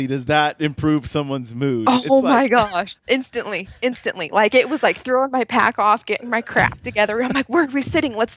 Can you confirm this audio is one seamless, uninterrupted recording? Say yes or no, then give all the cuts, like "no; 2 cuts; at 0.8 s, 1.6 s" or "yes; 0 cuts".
yes; 0 cuts